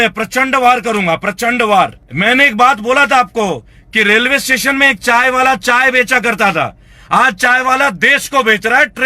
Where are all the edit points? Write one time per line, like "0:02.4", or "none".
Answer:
0:02.1